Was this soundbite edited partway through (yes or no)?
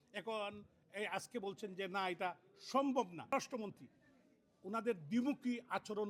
yes